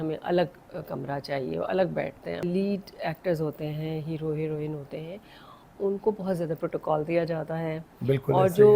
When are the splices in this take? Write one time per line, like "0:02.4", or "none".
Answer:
0:02.4